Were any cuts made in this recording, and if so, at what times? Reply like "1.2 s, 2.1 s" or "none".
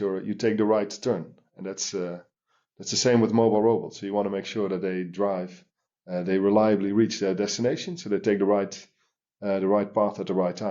none